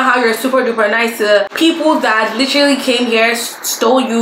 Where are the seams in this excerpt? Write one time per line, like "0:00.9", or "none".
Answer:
0:01.5